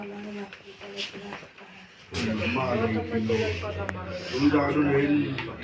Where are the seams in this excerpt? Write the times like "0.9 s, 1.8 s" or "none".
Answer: 2.2 s